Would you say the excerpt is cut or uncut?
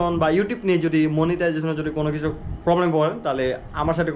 uncut